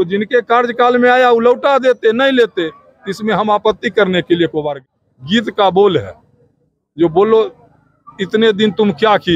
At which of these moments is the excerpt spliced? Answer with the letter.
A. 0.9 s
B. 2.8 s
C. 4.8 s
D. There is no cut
C